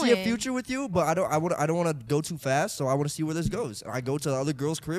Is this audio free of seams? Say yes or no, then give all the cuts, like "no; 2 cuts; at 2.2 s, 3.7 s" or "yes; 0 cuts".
yes; 0 cuts